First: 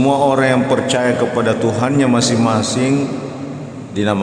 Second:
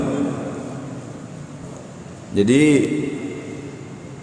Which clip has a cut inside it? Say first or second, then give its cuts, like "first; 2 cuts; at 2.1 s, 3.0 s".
second; 1 cut; at 1.6 s